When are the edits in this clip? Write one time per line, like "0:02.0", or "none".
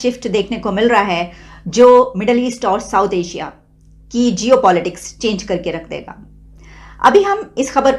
none

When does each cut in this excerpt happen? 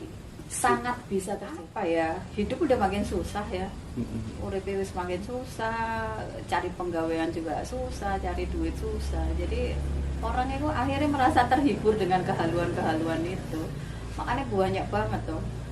0:01.7

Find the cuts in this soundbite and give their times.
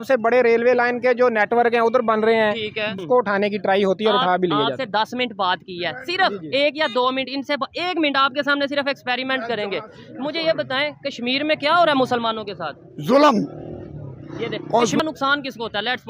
0:02.9
0:15.0

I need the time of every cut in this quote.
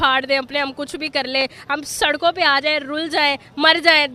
none

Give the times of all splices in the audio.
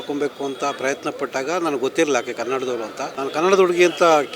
0:03.0

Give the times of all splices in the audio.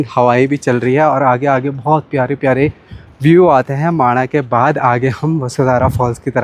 none

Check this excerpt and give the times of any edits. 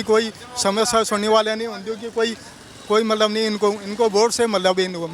none

